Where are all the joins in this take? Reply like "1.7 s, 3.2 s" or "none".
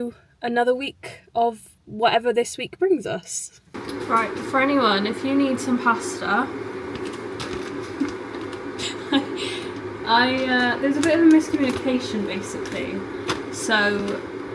none